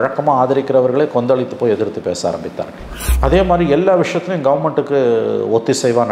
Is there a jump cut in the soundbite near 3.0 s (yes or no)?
yes